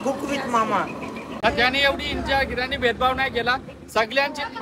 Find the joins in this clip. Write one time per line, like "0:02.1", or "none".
0:01.3